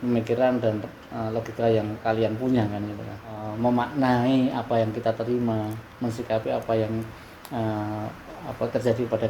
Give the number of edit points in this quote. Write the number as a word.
one